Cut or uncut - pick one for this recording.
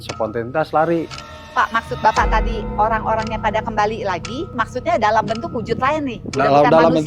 cut